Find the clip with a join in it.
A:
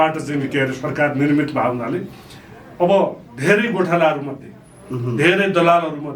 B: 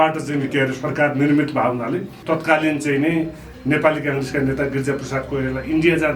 B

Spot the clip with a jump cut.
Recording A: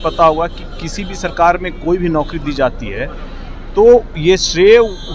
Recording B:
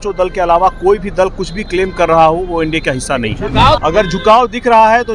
B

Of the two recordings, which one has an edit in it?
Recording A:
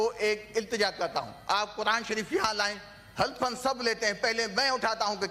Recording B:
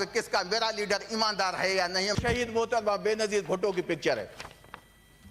B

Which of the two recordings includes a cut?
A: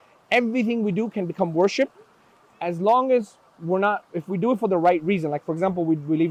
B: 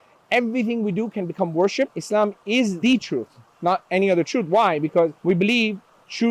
B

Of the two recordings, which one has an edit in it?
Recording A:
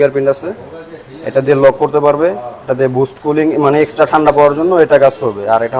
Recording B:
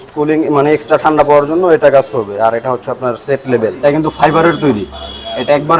B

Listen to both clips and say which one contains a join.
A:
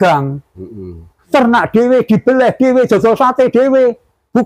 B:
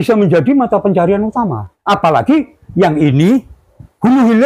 B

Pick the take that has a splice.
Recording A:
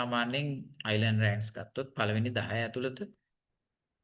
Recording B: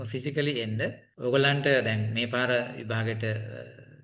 B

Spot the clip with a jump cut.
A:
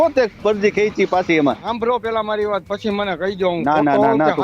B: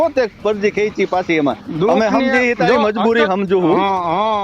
A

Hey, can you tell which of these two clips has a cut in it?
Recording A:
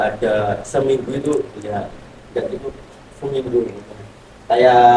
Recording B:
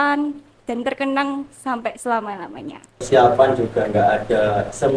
B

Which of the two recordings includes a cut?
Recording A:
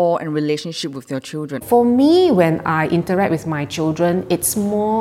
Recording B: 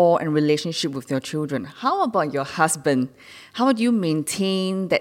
A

